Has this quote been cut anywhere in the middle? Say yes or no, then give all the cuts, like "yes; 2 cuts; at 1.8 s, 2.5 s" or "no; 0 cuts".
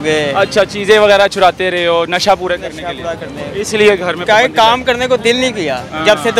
no; 0 cuts